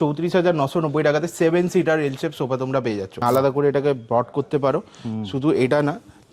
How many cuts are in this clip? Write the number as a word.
one